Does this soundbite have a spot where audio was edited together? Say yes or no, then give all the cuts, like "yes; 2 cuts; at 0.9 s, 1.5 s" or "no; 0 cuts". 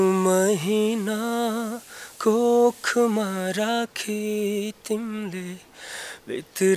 no; 0 cuts